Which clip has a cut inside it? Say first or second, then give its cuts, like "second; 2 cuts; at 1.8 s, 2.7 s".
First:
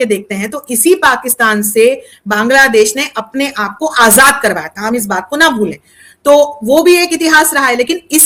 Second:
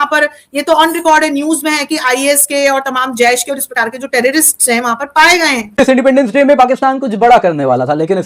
second; 1 cut; at 5.8 s